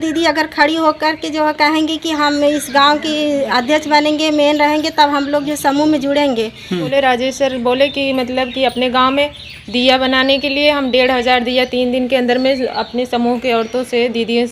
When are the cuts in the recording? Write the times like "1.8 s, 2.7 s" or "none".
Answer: 6.9 s